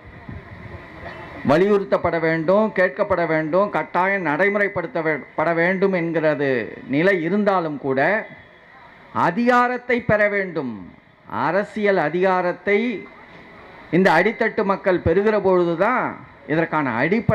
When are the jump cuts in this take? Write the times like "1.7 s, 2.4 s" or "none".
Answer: none